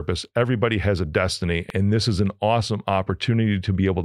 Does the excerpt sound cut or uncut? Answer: cut